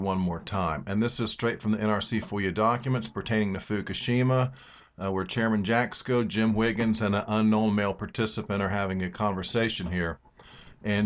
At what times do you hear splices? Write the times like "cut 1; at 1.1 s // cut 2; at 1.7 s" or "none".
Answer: none